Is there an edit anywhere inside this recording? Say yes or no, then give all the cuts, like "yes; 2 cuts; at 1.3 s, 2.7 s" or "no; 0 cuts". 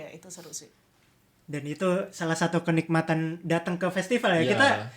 no; 0 cuts